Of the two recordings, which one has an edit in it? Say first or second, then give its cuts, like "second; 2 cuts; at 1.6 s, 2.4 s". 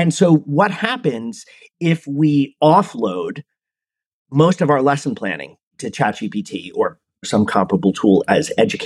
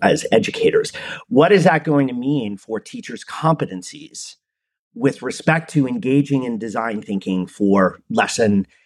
first; 1 cut; at 7.2 s